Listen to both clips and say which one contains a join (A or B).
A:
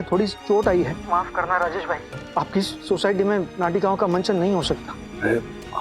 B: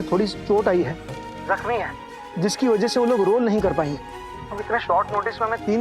A